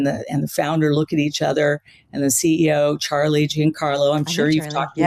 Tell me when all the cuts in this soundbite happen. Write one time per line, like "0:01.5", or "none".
none